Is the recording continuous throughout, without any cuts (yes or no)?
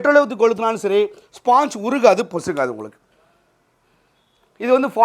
yes